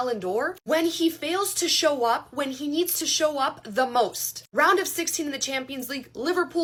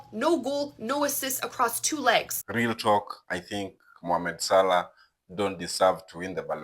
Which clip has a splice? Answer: second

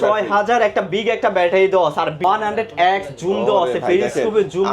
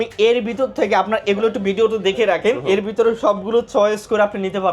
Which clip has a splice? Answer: first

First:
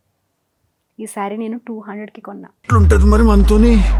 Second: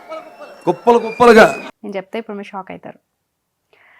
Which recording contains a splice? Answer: second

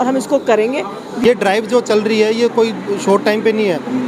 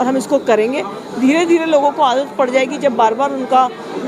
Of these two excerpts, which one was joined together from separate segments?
first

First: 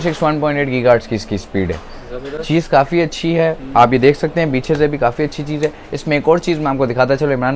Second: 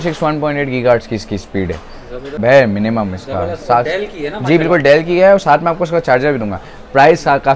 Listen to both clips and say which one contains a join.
second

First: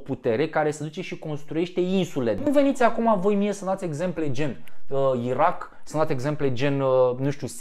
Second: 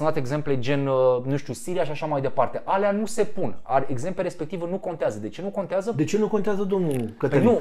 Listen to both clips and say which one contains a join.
first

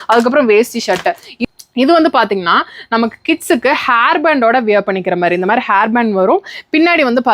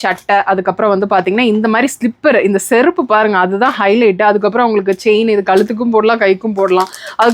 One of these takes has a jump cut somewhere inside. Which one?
first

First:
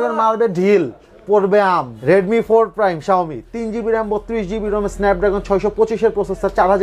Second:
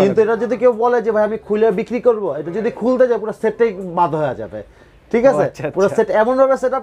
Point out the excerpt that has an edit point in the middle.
first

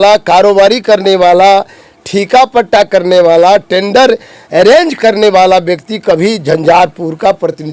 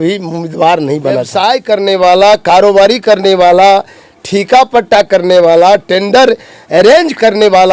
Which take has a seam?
second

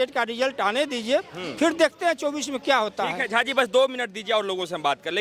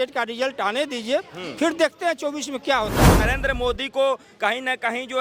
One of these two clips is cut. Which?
second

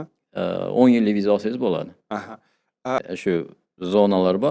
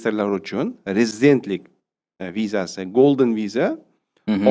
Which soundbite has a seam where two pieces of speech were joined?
first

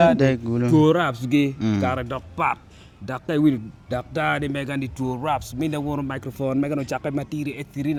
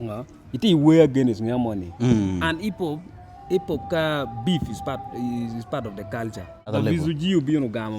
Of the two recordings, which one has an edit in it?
second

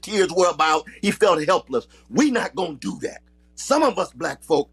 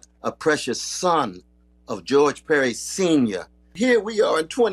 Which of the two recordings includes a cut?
second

